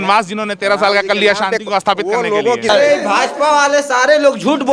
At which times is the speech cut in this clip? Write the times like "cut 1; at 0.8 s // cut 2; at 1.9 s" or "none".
cut 1; at 2.7 s